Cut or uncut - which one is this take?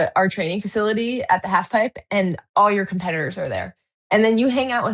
uncut